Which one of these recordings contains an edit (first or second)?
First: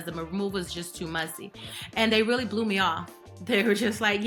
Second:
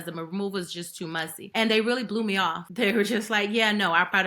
second